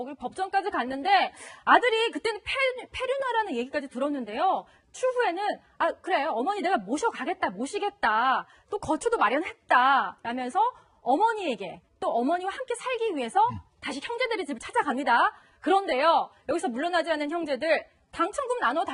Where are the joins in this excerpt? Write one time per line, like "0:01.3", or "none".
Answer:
none